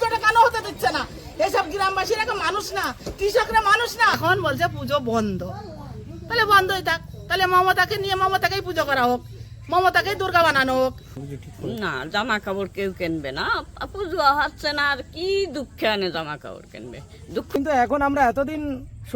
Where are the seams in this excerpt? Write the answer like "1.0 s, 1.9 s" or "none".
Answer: 4.2 s, 11.1 s, 17.6 s